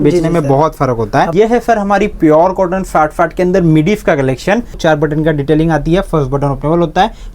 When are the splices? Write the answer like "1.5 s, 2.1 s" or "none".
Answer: 1.3 s, 4.8 s

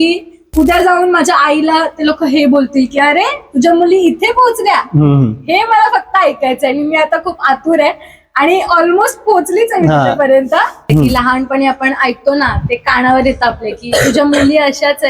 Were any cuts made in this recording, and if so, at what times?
10.8 s

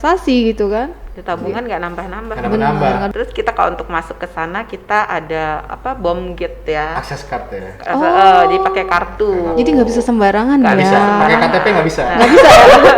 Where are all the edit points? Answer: 3.1 s

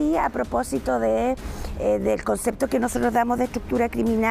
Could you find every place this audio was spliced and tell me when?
none

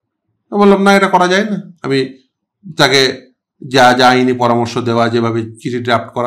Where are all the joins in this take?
1.7 s

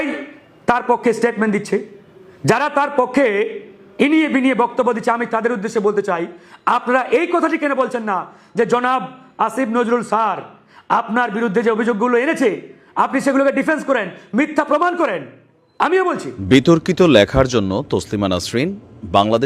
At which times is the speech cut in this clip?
16.3 s

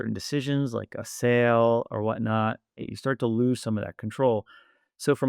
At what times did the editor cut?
2.9 s

